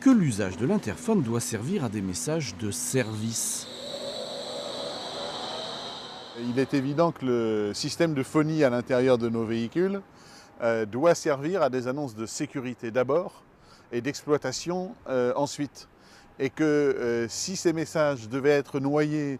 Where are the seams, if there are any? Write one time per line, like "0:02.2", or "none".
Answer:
none